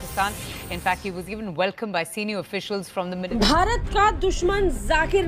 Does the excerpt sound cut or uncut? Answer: cut